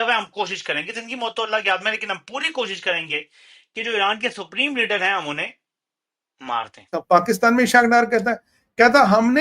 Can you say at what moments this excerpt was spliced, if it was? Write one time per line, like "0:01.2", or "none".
0:06.9